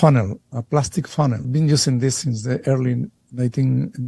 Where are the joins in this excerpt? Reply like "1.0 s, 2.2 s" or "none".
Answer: 1.5 s